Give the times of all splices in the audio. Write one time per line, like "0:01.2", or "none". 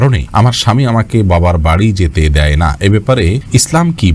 none